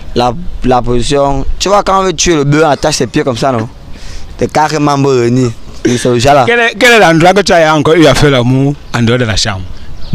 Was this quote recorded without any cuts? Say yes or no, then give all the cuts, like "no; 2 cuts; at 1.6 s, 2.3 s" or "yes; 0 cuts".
no; 1 cut; at 6.5 s